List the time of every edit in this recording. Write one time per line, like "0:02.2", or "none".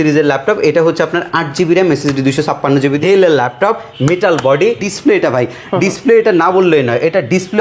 0:03.0
0:04.8